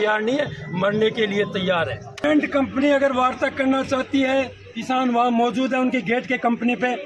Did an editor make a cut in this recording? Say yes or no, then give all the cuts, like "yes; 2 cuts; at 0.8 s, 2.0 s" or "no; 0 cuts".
yes; 1 cut; at 2.2 s